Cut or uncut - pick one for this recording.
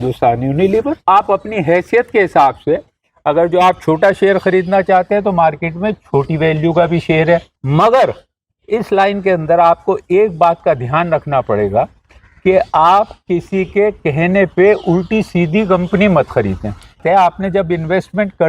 cut